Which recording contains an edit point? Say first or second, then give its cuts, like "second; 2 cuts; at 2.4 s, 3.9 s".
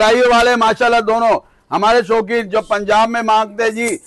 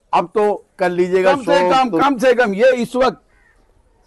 second; 1 cut; at 1.7 s